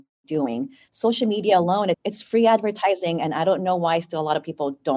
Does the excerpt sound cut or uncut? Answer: uncut